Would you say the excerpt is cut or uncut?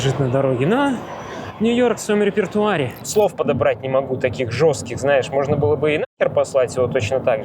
cut